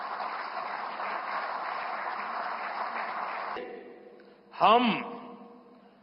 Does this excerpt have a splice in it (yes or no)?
no